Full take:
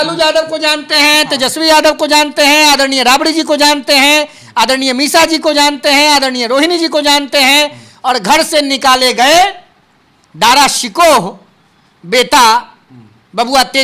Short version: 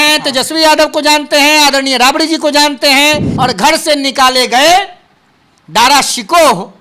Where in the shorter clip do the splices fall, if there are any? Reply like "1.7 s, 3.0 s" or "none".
3.3 s